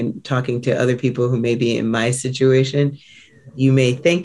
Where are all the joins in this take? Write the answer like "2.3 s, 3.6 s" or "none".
none